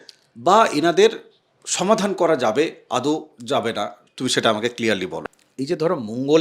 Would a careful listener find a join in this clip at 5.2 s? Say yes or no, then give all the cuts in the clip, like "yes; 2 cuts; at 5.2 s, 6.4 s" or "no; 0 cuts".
yes; 1 cut; at 5.2 s